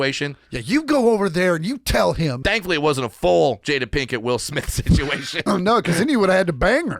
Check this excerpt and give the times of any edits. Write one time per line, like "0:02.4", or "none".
0:02.4
0:03.6
0:05.3